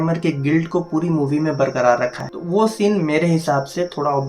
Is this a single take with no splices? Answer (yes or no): no